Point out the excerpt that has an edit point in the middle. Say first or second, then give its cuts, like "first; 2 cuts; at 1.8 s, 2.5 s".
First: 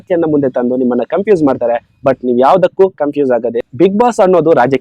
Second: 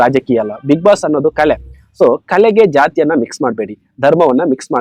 first; 1 cut; at 3.6 s